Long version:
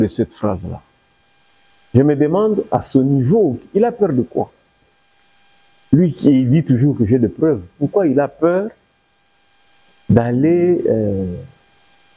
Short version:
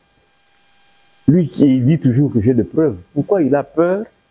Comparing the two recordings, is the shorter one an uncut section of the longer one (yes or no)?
yes